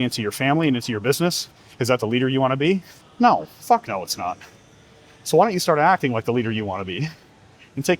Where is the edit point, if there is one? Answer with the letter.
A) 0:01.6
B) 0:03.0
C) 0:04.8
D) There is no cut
B